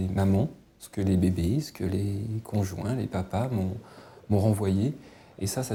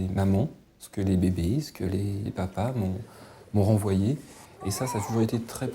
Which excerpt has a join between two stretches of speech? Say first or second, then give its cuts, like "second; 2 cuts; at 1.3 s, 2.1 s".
second; 1 cut; at 2.3 s